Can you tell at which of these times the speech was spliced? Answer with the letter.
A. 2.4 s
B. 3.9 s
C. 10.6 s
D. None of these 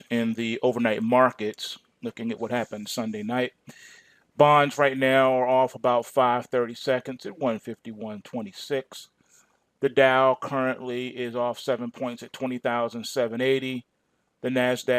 A